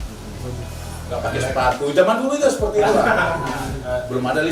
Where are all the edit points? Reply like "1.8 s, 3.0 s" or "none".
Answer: 1.0 s